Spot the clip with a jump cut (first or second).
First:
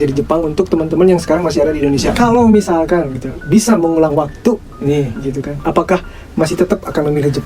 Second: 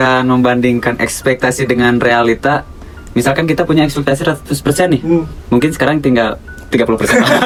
first